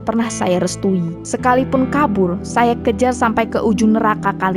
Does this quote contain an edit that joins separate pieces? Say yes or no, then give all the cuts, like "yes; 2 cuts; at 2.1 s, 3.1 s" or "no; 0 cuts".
no; 0 cuts